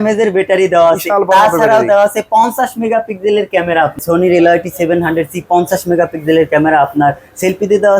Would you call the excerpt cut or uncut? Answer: cut